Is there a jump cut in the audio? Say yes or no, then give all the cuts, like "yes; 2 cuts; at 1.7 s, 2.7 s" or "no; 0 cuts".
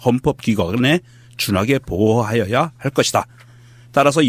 yes; 1 cut; at 2.9 s